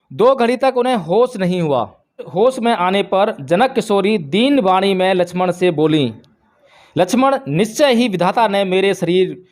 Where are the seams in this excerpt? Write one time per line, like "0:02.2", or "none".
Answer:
0:02.3